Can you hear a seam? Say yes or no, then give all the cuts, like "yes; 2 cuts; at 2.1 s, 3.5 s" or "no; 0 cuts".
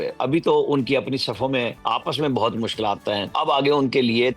yes; 2 cuts; at 1.8 s, 3.3 s